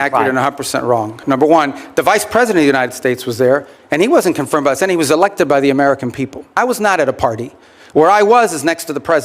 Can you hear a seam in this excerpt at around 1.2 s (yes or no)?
yes